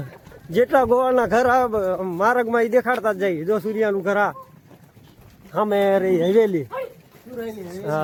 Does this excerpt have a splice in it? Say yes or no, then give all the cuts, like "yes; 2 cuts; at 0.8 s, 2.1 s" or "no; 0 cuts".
no; 0 cuts